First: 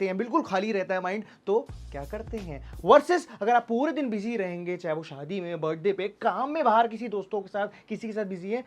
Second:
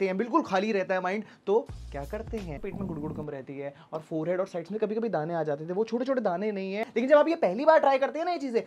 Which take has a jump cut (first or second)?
second